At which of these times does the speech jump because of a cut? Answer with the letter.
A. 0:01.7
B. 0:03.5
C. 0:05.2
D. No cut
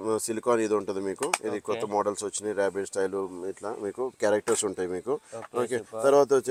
D